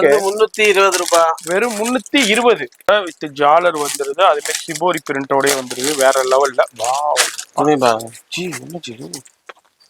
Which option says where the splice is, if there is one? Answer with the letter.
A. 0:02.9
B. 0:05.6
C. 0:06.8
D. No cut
A